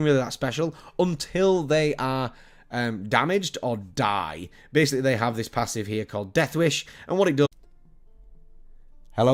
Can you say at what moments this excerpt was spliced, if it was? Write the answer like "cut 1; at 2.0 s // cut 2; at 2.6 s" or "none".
none